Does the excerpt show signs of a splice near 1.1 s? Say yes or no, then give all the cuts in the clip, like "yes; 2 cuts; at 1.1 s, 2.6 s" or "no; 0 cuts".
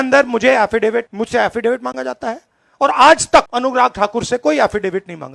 yes; 2 cuts; at 1.1 s, 3.5 s